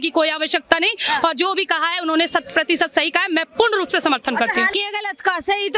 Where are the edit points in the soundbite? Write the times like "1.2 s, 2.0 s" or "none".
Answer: 4.7 s

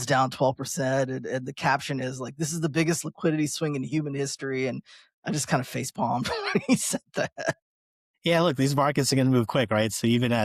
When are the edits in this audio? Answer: none

